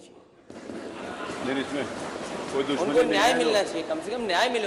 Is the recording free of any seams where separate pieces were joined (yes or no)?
yes